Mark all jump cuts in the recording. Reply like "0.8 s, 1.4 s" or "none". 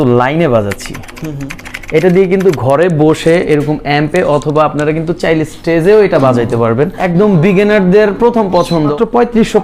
7.0 s, 8.9 s